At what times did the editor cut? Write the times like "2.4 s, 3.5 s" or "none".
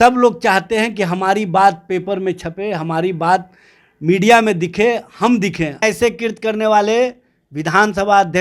5.8 s

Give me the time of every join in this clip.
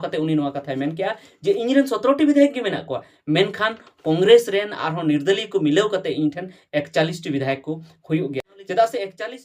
8.5 s

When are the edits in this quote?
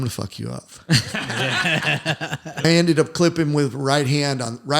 2.6 s

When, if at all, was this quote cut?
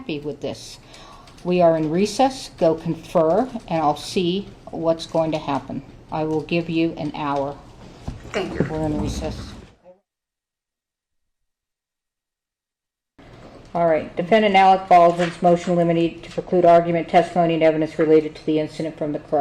none

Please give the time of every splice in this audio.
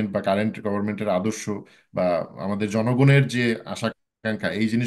none

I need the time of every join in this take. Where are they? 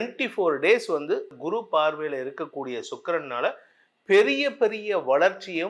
1.3 s

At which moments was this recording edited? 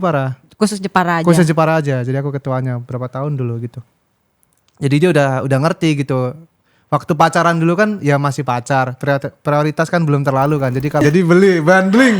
11.0 s

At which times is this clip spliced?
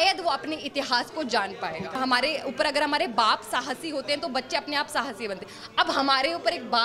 2.0 s

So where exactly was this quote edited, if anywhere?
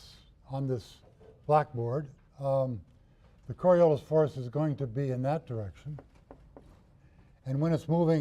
5.6 s

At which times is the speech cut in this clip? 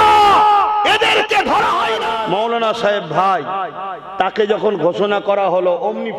2.0 s

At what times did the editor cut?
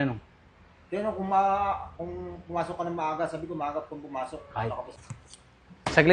4.9 s

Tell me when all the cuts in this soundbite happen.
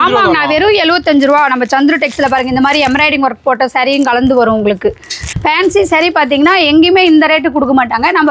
5.2 s

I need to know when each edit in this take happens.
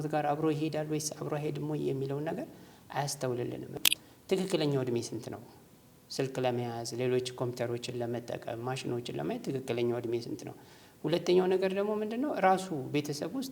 3.7 s

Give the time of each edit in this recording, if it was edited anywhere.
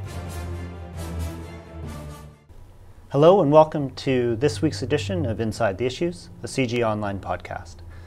none

